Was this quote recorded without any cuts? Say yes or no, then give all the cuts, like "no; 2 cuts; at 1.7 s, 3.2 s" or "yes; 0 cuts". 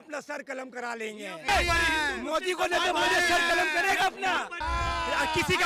no; 2 cuts; at 1.5 s, 4.6 s